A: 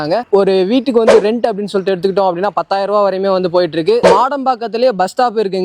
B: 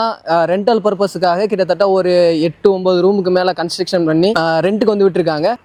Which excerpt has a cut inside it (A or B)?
A